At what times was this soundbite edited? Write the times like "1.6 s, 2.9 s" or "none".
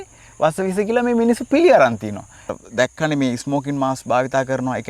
2.5 s